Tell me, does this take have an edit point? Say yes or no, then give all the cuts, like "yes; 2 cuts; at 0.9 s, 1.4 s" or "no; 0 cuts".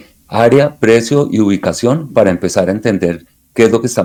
no; 0 cuts